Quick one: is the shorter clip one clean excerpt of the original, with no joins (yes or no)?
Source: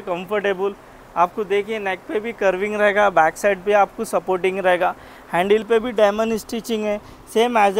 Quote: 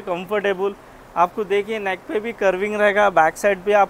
yes